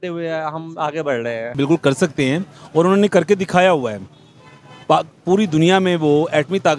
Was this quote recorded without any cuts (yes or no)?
no